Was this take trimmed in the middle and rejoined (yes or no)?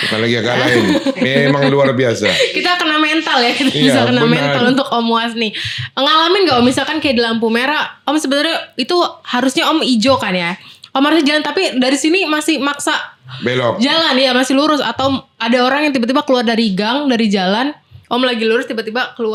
no